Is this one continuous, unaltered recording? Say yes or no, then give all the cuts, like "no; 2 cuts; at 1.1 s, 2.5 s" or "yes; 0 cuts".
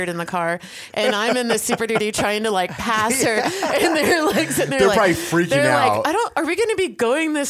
yes; 0 cuts